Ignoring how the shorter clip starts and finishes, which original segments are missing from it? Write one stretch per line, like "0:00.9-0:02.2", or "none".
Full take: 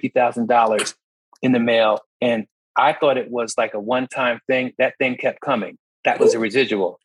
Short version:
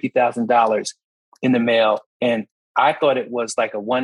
none